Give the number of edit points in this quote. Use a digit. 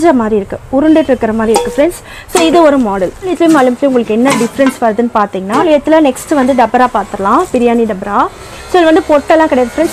2